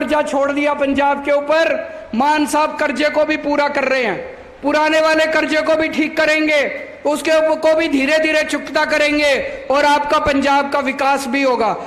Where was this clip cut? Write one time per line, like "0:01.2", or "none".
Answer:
none